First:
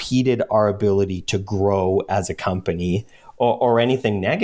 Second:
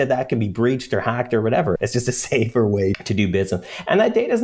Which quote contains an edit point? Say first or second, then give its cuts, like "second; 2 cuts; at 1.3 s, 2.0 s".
second; 2 cuts; at 1.8 s, 3.0 s